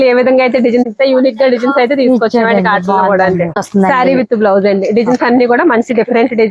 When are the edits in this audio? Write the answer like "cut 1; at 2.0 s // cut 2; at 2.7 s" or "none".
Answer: cut 1; at 0.9 s // cut 2; at 3.6 s